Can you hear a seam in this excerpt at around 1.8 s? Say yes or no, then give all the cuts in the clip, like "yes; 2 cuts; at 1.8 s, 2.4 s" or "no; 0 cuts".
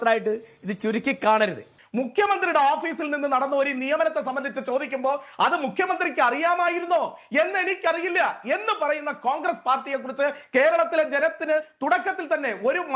yes; 1 cut; at 1.8 s